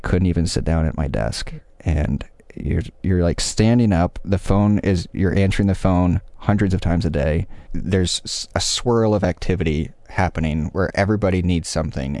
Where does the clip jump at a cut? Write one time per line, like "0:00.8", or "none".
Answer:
0:07.8